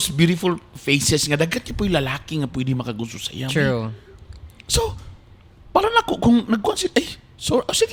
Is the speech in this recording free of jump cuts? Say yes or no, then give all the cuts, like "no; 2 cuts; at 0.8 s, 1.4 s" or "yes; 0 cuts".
yes; 0 cuts